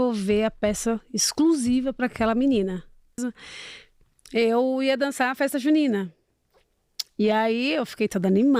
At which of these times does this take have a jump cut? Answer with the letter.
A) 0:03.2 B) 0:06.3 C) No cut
A